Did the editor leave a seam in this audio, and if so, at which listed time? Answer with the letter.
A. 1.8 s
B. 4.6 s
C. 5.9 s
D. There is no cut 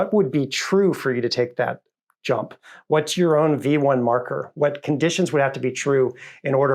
D